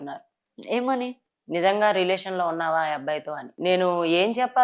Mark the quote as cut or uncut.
cut